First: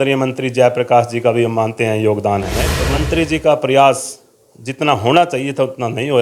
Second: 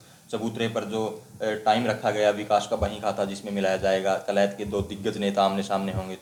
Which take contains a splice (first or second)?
first